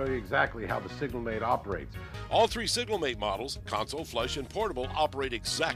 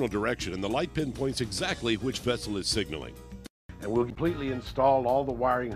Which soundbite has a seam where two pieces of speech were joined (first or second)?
second